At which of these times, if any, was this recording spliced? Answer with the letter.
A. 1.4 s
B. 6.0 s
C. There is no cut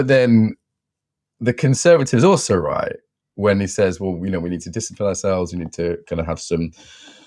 C